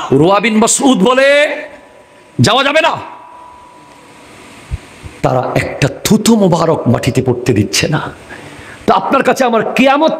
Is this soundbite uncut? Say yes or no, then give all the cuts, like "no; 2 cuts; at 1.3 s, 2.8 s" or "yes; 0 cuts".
yes; 0 cuts